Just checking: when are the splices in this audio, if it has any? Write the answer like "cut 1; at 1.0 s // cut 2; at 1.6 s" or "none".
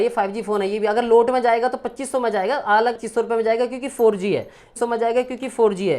cut 1; at 3.0 s // cut 2; at 4.7 s